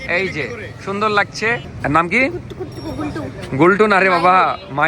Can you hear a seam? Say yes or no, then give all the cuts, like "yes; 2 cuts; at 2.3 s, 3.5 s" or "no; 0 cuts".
yes; 1 cut; at 1.7 s